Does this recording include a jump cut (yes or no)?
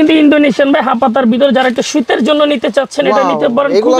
no